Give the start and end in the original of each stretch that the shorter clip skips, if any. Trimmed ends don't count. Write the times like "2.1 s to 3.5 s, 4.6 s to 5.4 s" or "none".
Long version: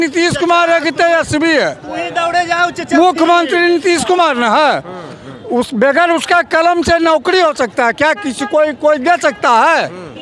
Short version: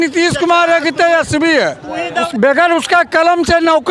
2.3 s to 5.7 s